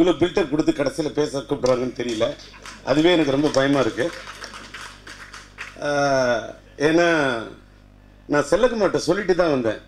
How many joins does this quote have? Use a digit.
0